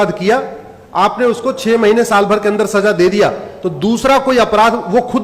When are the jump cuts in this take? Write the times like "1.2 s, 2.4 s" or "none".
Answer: none

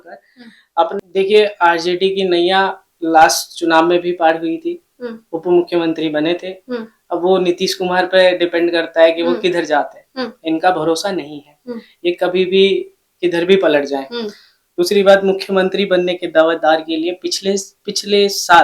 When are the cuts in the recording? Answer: 1.0 s

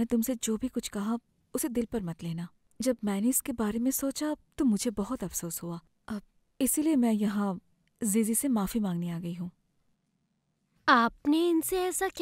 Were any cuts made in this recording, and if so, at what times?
none

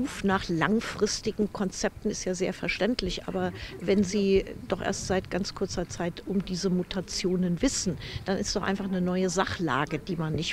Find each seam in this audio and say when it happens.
none

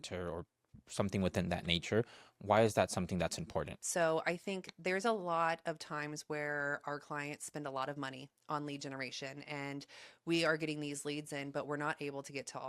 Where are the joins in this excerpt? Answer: 3.8 s

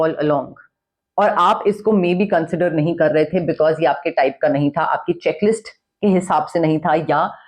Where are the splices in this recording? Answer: none

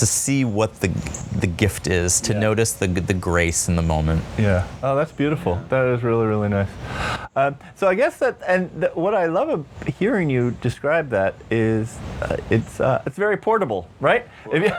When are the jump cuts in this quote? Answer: none

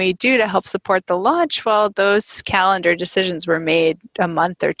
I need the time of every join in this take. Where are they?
none

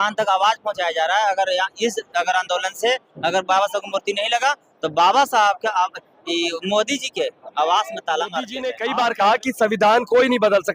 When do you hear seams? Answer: 8.7 s

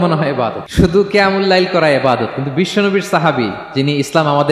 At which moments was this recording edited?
0.9 s

